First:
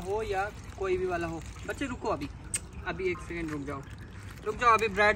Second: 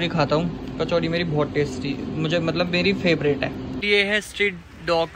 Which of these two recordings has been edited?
second; 1 cut; at 3.8 s

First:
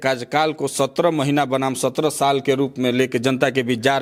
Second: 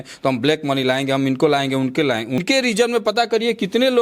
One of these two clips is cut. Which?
second; 1 cut; at 2.4 s

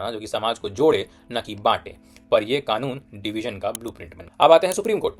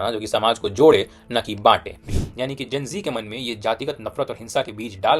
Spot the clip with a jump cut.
second; 1 cut; at 2.1 s

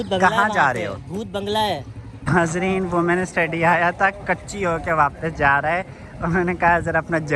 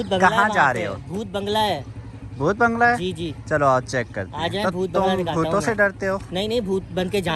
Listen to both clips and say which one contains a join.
first; 1 cut; at 2.1 s

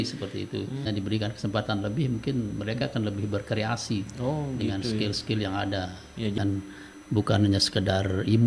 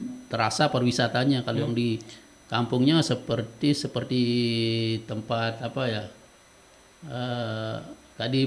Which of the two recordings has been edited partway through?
first; 2 cuts; at 0.9 s, 6.4 s

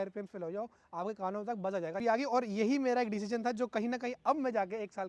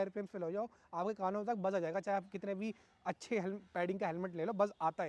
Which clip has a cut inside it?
first; 1 cut; at 2.0 s

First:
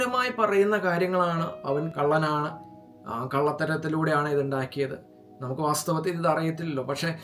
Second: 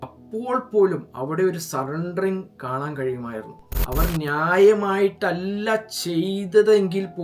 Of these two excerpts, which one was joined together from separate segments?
second; 1 cut; at 3.7 s

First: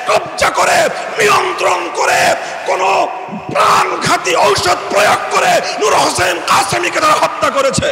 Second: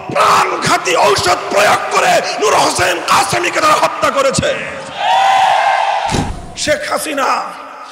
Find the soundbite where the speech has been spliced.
second; 1 cut; at 6.3 s

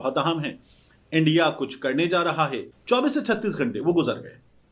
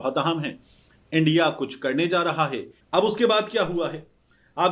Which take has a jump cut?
second; 1 cut; at 2.7 s

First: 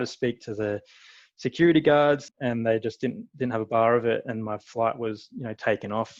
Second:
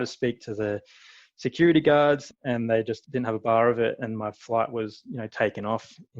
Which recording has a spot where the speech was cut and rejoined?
second; 1 cut; at 2.6 s

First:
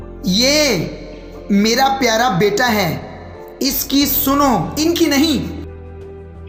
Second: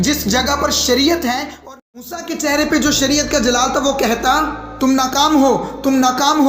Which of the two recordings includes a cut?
second; 1 cut; at 1.5 s

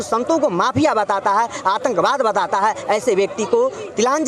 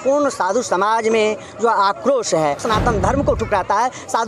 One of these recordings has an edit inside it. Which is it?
second; 1 cut; at 2.6 s

